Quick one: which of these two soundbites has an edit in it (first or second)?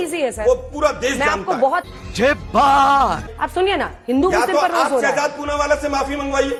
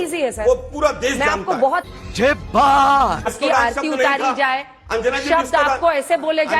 second